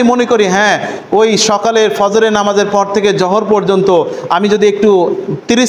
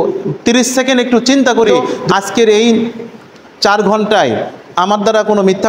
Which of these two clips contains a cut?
second; 1 cut; at 1.9 s

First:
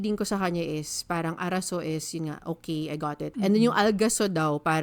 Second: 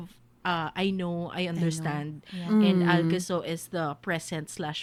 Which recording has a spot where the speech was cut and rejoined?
first; 1 cut; at 3.3 s

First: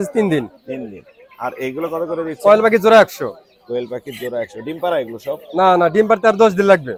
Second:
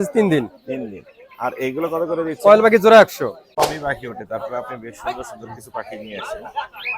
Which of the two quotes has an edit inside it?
second; 1 cut; at 3.4 s

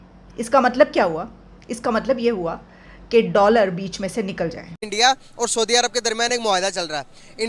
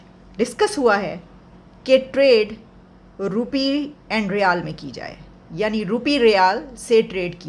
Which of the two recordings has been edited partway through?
first; 1 cut; at 4.9 s

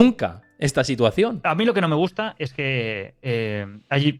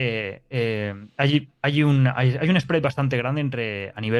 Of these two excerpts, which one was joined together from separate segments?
first; 1 cut; at 1.4 s

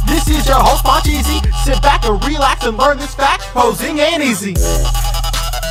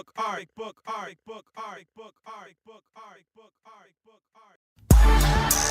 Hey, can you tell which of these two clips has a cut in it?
second; 1 cut; at 4.7 s

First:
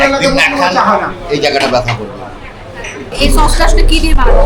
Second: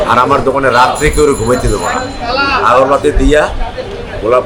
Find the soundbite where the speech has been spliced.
first; 1 cut; at 3.1 s

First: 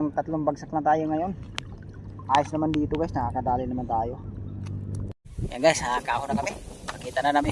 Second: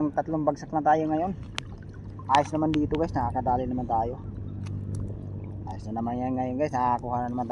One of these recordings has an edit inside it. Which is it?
first; 1 cut; at 5.2 s

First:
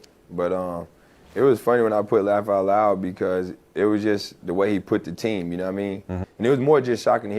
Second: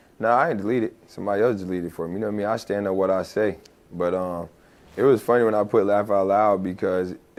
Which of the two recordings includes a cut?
first; 1 cut; at 6.2 s

